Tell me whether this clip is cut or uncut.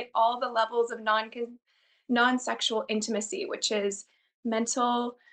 uncut